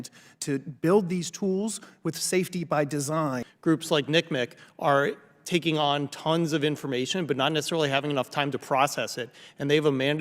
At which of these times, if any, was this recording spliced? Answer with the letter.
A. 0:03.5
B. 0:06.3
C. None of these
A